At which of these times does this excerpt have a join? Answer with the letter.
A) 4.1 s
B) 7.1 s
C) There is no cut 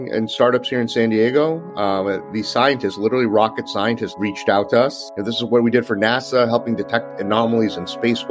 A